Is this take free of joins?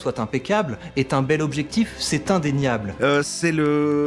no; 1 cut; at 2.9 s

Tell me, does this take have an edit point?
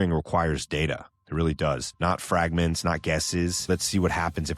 yes; 2 cuts; at 1.9 s, 3.7 s

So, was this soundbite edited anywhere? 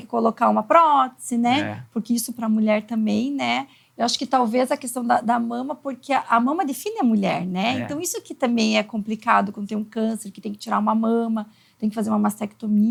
no; 0 cuts

